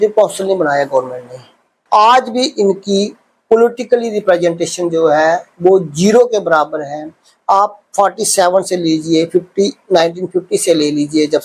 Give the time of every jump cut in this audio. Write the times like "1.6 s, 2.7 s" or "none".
1.7 s